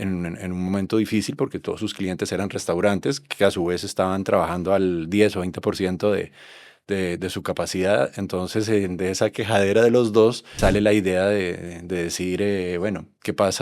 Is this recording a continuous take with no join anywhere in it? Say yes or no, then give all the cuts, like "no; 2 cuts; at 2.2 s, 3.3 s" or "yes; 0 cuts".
no; 1 cut; at 10.5 s